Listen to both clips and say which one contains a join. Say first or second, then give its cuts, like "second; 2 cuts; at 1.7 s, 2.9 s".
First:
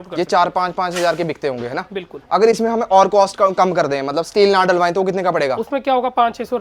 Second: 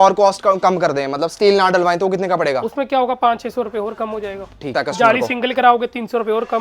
second; 1 cut; at 4.7 s